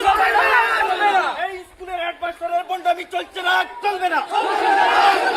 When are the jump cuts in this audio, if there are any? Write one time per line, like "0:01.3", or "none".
none